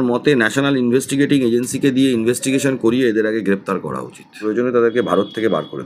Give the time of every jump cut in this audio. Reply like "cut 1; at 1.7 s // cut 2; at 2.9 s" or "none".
cut 1; at 4.4 s